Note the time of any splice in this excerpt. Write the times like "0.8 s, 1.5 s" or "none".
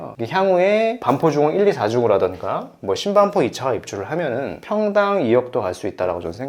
none